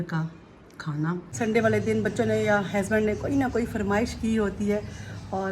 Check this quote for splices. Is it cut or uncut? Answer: cut